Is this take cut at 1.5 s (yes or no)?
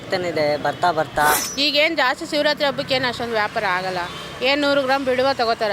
yes